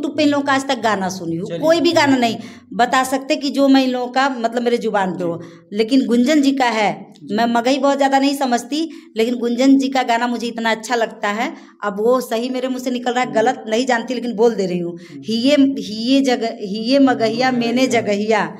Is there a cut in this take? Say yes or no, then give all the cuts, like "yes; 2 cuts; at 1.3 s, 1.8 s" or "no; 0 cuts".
no; 0 cuts